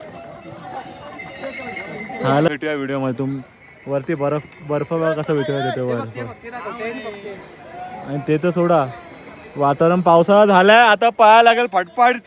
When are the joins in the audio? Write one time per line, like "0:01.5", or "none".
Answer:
0:02.5